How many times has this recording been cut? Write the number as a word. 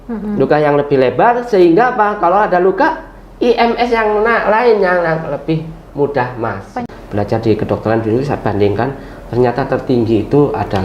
one